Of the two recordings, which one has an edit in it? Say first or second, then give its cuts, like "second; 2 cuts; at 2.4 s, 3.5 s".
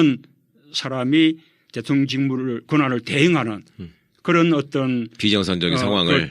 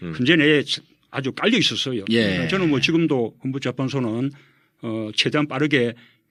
first; 1 cut; at 3.8 s